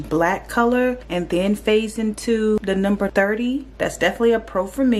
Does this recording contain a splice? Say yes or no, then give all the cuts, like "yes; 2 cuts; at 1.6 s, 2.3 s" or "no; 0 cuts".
yes; 1 cut; at 2.6 s